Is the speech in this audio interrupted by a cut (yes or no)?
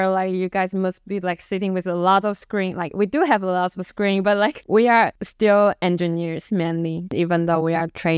yes